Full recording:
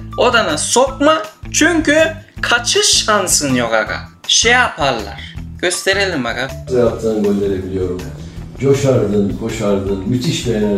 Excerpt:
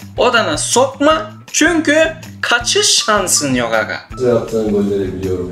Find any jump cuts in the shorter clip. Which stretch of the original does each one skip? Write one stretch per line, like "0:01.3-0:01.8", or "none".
0:04.0-0:06.5